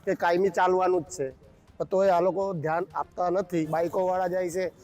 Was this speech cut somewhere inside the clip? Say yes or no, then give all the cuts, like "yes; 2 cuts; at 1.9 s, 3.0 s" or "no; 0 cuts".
yes; 1 cut; at 3.7 s